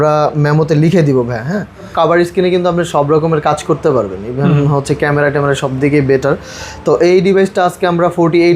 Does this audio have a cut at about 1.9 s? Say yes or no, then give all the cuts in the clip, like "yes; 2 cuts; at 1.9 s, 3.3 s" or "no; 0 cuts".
yes; 1 cut; at 1.9 s